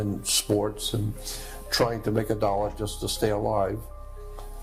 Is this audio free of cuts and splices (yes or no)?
yes